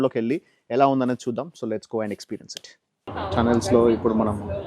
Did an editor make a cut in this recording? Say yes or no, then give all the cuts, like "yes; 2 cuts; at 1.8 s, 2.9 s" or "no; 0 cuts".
yes; 1 cut; at 3.1 s